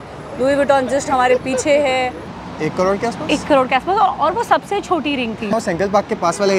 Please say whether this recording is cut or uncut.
cut